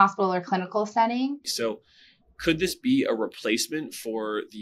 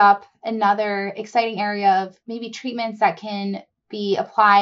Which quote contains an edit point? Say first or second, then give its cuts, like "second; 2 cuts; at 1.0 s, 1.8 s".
first; 1 cut; at 1.5 s